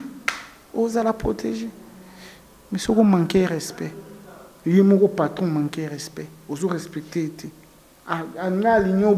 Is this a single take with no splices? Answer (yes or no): yes